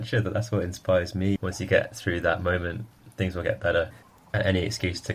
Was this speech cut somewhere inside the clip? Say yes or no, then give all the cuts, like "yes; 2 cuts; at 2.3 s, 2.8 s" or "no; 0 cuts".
yes; 2 cuts; at 1.4 s, 4.1 s